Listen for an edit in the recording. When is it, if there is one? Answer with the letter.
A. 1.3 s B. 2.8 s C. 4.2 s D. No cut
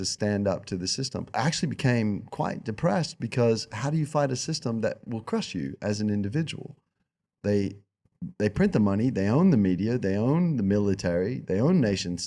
A